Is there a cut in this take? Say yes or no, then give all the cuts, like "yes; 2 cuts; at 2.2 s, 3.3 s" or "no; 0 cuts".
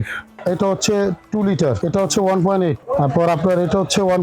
yes; 2 cuts; at 1.8 s, 2.8 s